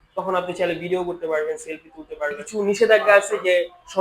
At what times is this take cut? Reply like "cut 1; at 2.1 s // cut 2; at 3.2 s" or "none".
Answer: cut 1; at 2.4 s